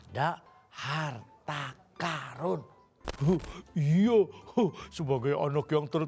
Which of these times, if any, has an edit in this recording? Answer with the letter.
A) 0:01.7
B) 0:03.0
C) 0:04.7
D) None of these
B